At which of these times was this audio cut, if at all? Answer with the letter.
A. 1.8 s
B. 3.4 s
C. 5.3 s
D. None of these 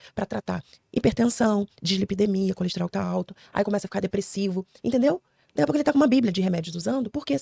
D